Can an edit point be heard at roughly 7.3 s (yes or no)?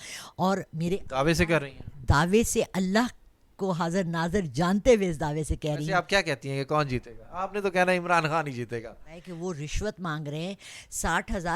no